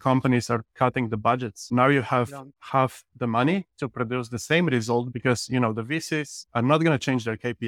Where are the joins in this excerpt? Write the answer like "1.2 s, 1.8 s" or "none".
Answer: 1.7 s